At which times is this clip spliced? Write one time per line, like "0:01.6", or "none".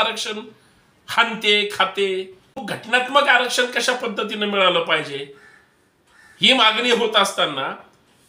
0:02.7